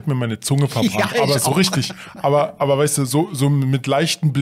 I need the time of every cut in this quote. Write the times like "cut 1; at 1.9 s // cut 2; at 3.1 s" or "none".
none